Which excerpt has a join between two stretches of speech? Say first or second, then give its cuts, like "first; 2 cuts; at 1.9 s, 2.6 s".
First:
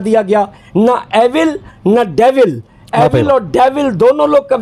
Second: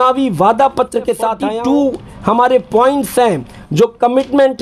second; 1 cut; at 1.4 s